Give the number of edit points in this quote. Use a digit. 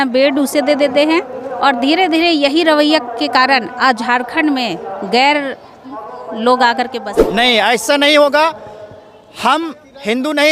1